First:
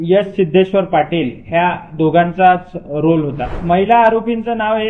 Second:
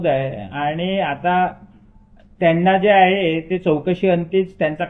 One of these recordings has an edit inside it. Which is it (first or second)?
first